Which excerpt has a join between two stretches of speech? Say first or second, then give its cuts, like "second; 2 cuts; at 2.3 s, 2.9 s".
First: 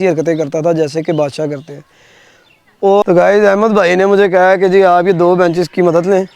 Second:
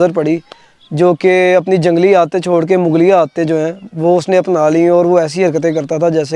first; 1 cut; at 3.0 s